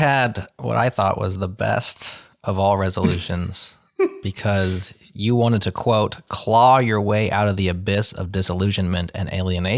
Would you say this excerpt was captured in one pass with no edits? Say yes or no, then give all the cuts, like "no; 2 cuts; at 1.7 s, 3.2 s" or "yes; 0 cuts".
yes; 0 cuts